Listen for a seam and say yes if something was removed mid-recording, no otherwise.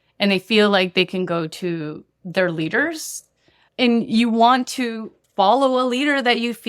no